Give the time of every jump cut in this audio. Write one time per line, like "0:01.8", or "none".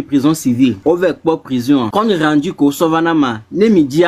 0:00.8
0:01.9